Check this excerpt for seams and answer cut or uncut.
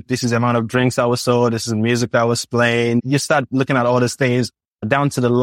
uncut